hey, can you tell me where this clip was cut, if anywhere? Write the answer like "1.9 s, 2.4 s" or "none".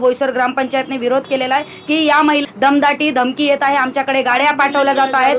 2.4 s